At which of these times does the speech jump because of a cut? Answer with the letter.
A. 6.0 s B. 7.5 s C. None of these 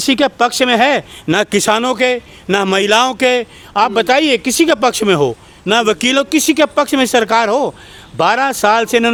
C